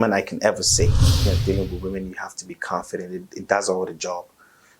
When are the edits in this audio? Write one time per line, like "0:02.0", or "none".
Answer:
0:01.3